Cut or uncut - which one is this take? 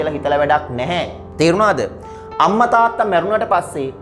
uncut